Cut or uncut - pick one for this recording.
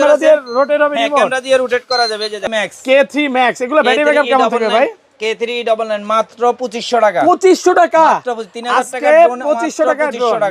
cut